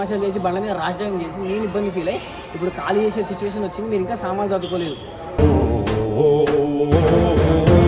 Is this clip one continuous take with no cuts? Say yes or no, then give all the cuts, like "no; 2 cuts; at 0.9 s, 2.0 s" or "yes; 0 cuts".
yes; 0 cuts